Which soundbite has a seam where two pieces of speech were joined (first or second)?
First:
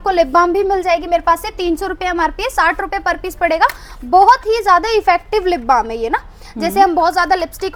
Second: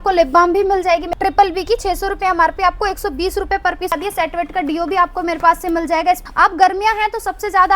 second